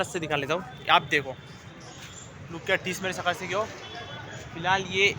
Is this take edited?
no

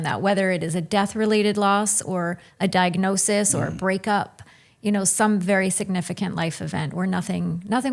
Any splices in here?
no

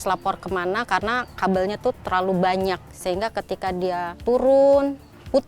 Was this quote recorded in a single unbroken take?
no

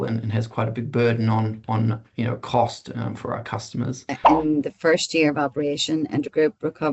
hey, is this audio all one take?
no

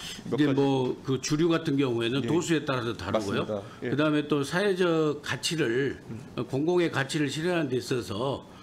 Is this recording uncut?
yes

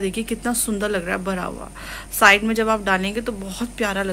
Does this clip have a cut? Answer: no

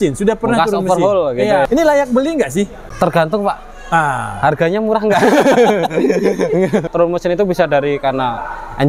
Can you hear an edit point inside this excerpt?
yes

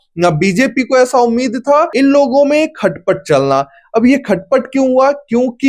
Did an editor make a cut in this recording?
yes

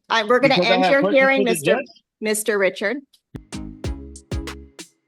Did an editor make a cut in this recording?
no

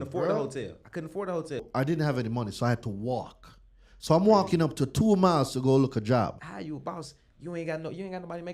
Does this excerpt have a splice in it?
yes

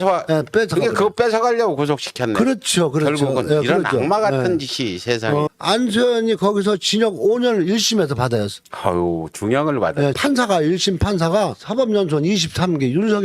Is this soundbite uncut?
no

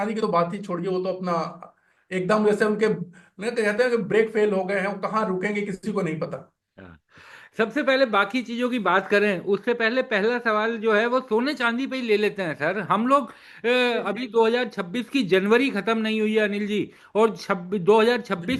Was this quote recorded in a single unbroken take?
yes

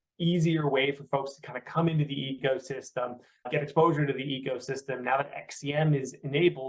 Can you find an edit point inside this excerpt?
yes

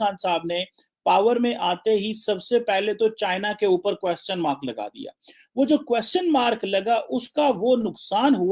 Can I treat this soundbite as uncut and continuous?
yes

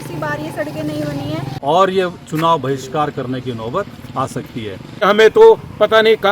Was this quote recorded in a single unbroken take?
no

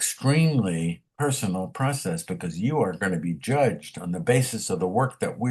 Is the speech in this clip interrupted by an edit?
yes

